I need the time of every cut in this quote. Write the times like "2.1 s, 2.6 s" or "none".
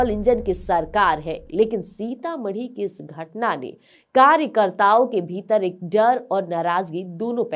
none